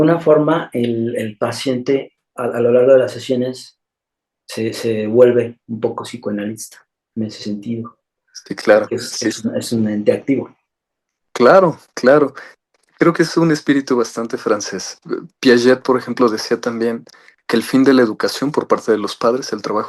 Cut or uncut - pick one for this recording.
cut